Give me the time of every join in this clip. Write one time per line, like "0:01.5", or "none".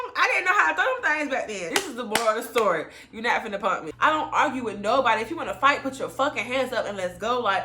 0:01.6
0:03.9